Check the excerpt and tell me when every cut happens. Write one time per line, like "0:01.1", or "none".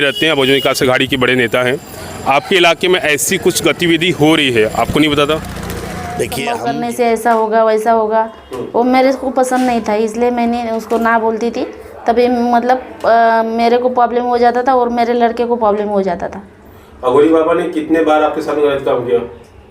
0:06.4